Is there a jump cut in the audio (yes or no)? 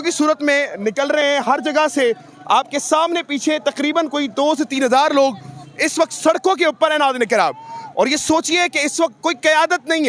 no